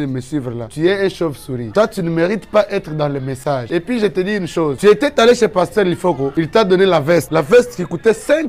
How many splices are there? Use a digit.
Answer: 0